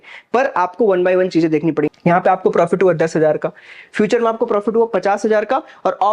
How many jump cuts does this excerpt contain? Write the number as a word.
one